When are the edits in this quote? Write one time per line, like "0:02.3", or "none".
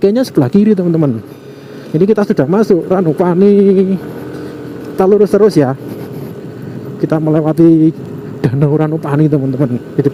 none